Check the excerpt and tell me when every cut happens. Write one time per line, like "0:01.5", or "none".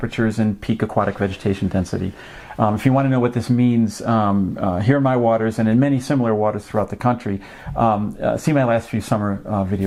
none